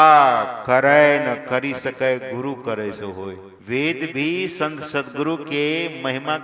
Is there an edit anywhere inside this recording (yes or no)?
yes